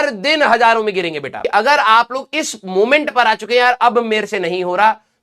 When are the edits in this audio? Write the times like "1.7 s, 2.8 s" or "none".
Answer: 1.4 s